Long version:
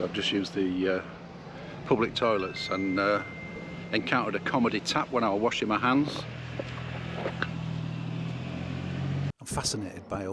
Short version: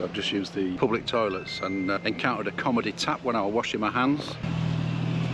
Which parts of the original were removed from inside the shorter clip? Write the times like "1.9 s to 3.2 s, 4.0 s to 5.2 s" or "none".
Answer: 0.8 s to 1.8 s, 3.1 s to 3.8 s, 6.3 s to 7.5 s